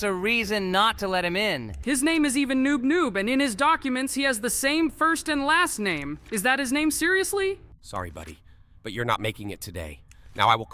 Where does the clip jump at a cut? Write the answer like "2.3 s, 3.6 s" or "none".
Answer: 1.7 s, 7.7 s